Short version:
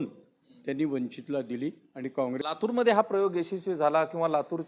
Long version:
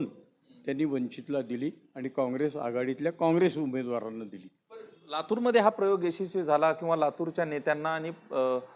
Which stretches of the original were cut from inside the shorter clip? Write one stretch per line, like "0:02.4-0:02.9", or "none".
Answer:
0:02.4-0:05.1